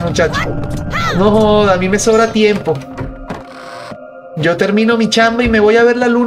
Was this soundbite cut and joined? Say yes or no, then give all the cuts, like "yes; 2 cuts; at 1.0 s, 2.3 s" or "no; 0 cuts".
no; 0 cuts